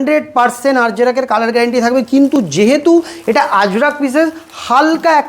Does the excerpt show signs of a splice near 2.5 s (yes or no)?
no